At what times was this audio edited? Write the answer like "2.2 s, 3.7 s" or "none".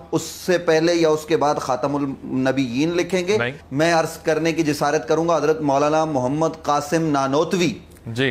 3.6 s